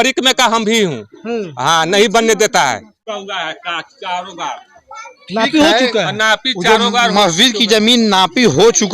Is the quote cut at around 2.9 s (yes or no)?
yes